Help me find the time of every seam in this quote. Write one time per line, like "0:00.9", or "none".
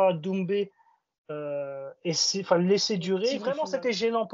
0:03.4